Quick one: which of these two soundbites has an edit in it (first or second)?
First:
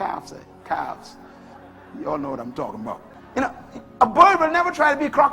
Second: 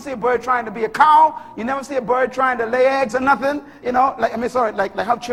first